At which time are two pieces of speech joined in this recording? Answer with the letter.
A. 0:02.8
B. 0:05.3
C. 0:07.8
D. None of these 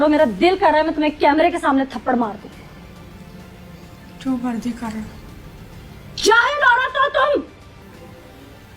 C